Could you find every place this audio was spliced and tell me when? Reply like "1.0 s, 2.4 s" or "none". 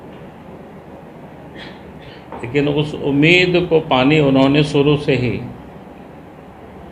none